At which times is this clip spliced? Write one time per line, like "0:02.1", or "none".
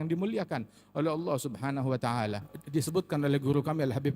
0:02.5